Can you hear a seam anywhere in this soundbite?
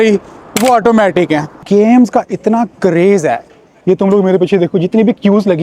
yes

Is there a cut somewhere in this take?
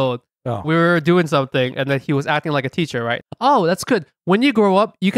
yes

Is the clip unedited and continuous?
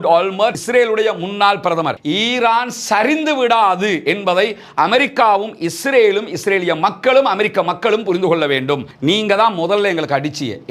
no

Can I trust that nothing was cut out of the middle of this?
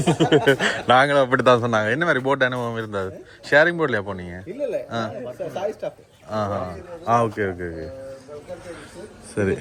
yes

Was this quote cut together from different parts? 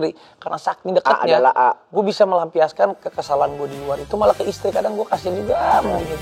no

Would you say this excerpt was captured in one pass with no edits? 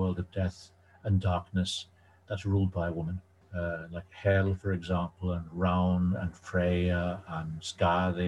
no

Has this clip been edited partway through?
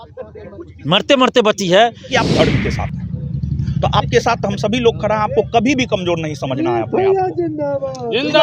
yes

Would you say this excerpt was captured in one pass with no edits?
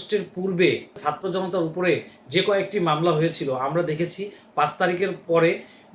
no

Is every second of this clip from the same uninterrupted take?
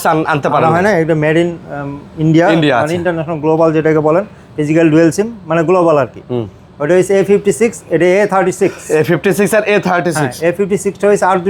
yes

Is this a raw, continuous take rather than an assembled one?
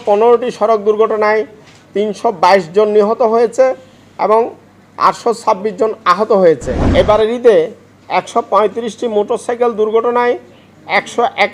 no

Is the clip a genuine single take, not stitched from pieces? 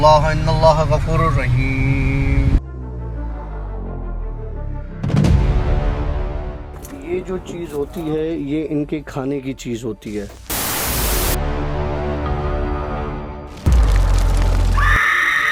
yes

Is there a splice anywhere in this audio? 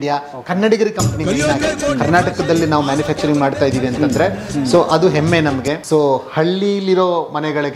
yes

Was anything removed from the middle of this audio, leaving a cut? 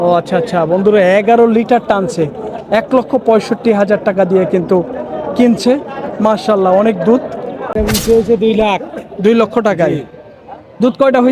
yes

